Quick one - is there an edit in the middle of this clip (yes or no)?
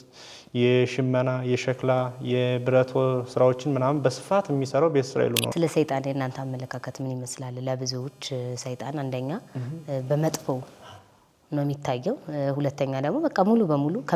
yes